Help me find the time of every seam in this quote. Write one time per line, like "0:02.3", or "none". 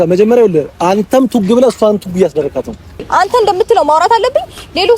0:03.0